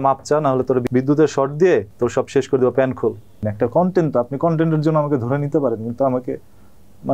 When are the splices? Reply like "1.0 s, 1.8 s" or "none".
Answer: 0.9 s, 1.9 s, 3.5 s